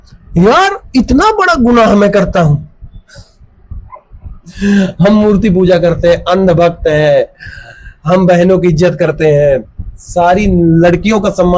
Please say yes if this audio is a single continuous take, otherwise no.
yes